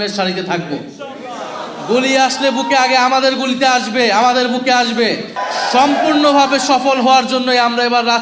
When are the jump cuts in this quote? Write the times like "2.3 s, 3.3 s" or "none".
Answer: 5.4 s